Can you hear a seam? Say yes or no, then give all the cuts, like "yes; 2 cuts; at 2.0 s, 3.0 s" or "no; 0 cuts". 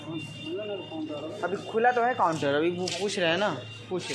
no; 0 cuts